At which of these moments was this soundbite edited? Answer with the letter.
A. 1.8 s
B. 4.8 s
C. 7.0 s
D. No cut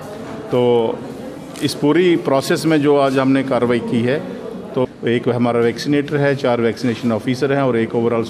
B